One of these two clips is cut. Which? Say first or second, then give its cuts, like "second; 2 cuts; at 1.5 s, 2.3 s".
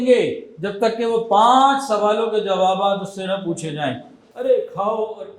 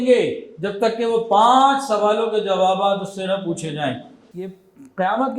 first; 1 cut; at 4.2 s